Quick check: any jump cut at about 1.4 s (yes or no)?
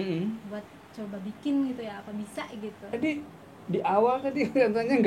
no